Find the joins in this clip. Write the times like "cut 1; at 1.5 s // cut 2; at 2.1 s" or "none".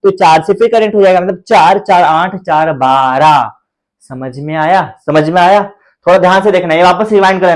none